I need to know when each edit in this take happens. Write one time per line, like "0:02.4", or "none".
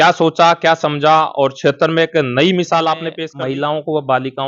0:03.2